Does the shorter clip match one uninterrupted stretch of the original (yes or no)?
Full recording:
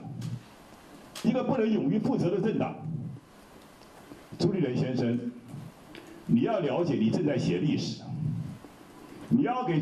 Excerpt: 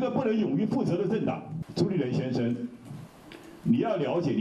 no